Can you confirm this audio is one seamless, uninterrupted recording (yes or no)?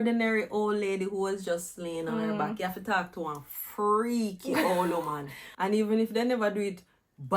no